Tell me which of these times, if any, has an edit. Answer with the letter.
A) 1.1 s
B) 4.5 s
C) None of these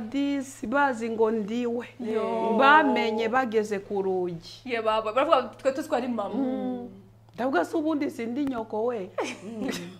C